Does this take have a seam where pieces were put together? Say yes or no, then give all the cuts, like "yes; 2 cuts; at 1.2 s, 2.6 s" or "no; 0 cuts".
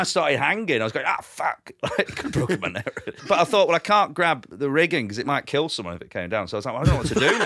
yes; 3 cuts; at 3.2 s, 4.5 s, 5.5 s